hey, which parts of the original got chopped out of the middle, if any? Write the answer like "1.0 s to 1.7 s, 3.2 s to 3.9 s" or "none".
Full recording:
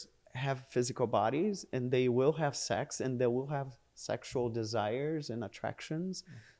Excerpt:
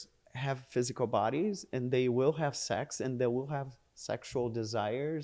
none